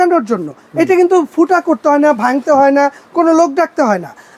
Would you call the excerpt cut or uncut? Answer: uncut